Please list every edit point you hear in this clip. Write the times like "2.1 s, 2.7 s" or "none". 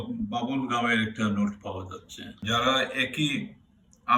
2.4 s